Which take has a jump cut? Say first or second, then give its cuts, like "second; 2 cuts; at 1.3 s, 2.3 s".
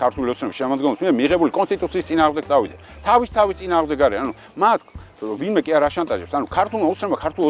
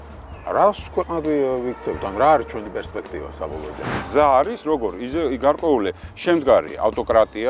second; 1 cut; at 3.9 s